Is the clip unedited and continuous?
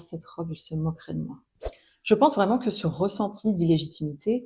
no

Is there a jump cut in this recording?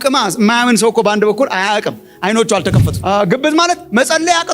yes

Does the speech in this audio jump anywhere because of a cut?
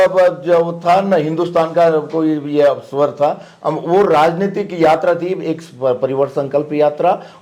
no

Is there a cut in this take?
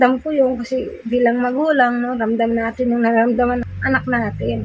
yes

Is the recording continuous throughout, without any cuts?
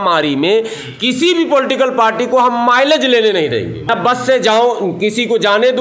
no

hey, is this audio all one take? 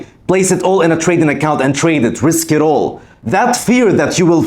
yes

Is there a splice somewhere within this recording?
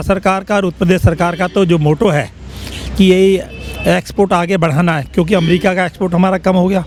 no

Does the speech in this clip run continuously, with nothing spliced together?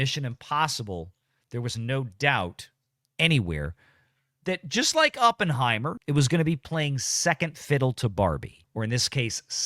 no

